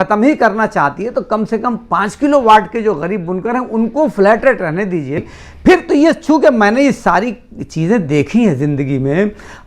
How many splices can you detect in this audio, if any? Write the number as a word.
one